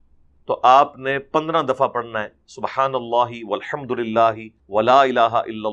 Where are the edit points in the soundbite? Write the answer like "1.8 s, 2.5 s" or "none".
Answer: 4.5 s